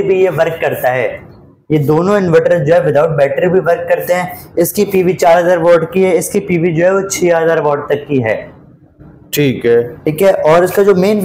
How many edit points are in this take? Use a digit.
0